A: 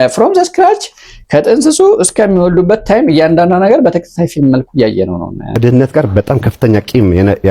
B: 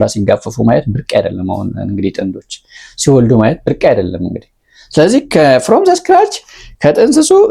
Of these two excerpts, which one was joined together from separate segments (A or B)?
A